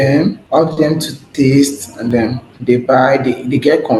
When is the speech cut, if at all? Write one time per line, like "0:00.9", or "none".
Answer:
0:01.0
0:02.2